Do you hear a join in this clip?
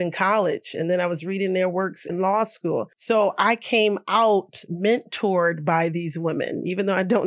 yes; 1 cut; at 2.9 s

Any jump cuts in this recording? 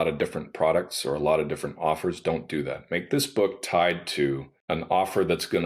yes; 1 cut; at 4.5 s

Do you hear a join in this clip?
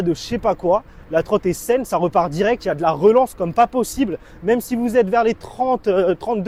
no; 0 cuts

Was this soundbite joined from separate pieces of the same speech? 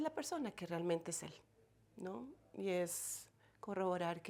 no; 0 cuts

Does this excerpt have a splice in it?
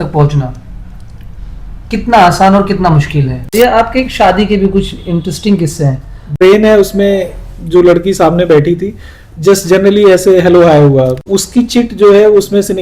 yes; 3 cuts; at 3.4 s, 6.3 s, 11.3 s

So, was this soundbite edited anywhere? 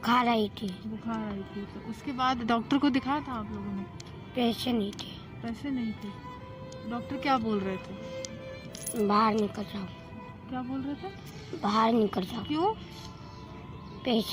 no; 0 cuts

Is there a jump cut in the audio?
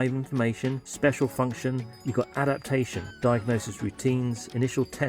yes; 3 cuts; at 0.9 s, 1.9 s, 3.0 s

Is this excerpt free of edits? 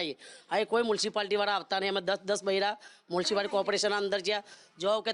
yes; 0 cuts

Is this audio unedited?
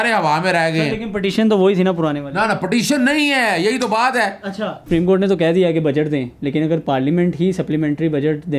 no; 1 cut; at 4.8 s

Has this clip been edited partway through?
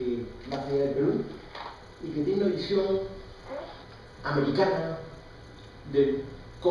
no; 0 cuts

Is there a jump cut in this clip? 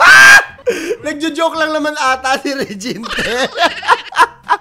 no; 0 cuts

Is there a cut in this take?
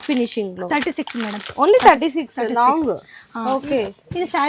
no; 0 cuts

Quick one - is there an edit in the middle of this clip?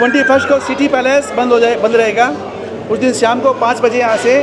no; 0 cuts

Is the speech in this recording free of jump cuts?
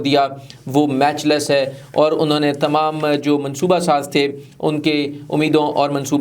yes; 0 cuts

